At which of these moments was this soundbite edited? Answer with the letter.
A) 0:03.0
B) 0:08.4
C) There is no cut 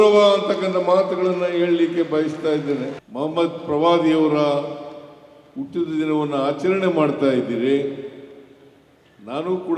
A